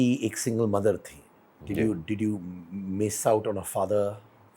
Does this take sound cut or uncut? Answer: uncut